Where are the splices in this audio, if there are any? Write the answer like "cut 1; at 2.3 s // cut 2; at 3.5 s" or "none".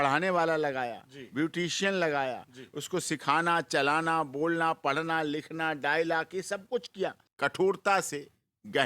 cut 1; at 7.2 s